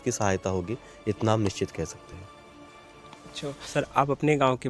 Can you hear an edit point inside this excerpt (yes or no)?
no